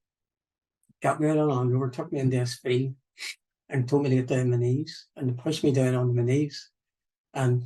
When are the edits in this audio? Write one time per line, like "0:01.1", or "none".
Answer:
none

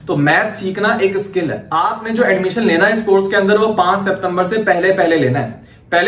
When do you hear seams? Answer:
0:01.6

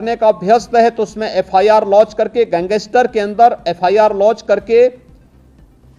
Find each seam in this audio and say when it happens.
none

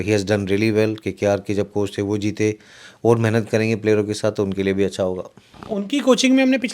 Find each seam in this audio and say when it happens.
none

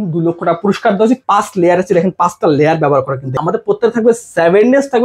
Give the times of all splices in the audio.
0:01.2
0:03.3

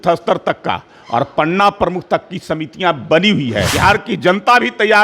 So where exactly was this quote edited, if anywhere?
0:03.7

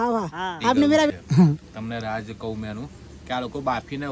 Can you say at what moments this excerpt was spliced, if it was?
0:01.1

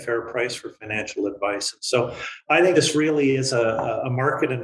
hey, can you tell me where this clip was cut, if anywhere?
0:02.7

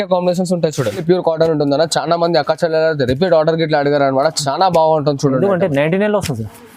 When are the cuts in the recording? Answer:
0:01.0

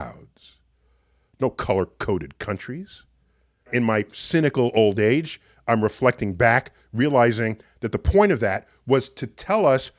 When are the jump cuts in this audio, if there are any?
0:03.7

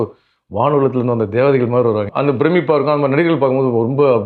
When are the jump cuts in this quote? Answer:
0:02.1

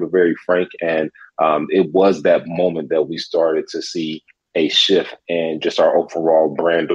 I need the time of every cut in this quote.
none

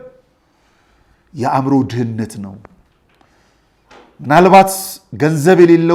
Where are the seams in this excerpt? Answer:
none

